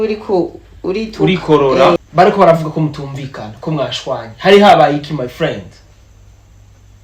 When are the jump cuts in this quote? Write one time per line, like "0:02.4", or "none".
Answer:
0:02.0